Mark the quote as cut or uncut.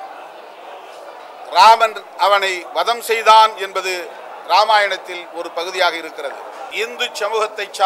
cut